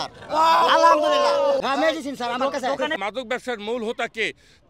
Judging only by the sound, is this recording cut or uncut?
cut